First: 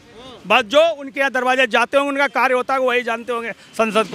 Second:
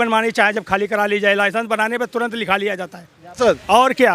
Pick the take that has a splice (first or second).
second